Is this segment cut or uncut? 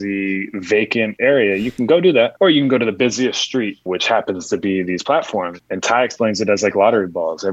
cut